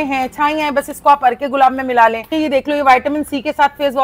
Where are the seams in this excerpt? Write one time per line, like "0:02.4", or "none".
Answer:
0:02.3